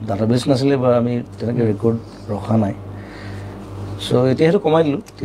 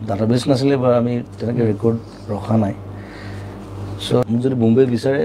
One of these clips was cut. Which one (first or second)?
second